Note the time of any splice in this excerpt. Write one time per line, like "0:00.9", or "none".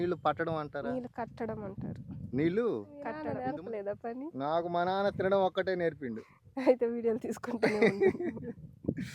0:03.1